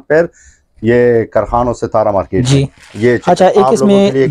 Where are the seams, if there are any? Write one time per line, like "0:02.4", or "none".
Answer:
none